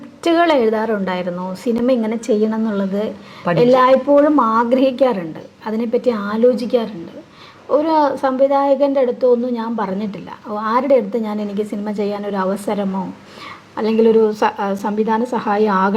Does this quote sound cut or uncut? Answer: uncut